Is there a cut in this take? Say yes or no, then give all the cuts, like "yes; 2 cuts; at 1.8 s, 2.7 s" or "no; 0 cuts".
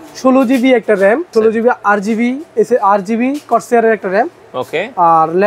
yes; 1 cut; at 1.3 s